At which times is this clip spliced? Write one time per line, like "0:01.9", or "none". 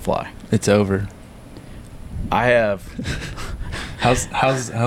none